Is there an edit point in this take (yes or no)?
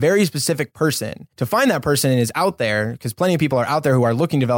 yes